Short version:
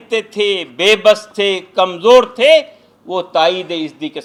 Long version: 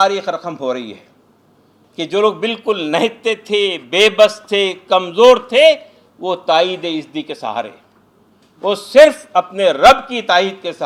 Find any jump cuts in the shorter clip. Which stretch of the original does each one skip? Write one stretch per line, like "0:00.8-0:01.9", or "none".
none